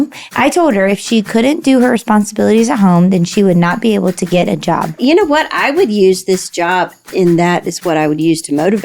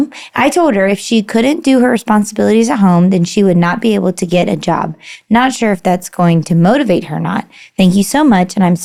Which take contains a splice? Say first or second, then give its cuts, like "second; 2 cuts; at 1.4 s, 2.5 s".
first; 2 cuts; at 5.0 s, 7.0 s